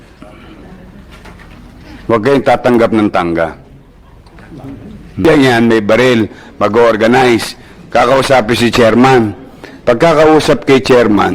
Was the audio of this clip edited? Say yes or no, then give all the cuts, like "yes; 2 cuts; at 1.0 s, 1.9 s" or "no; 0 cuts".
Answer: yes; 1 cut; at 5.2 s